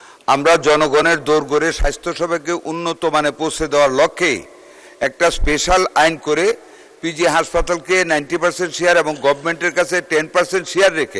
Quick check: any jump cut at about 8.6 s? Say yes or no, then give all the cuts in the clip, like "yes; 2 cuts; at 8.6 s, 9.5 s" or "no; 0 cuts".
no; 0 cuts